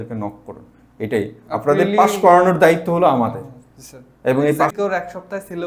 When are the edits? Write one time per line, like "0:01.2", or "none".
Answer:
0:04.7